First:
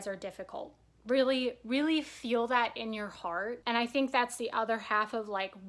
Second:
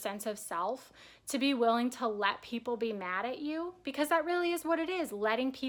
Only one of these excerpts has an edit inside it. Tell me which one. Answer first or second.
first